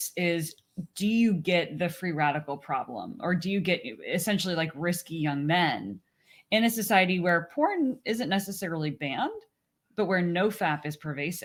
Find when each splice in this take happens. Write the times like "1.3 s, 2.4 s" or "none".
none